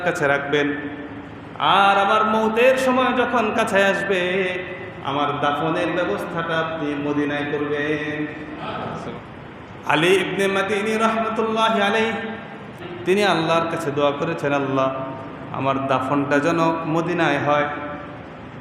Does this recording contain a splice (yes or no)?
yes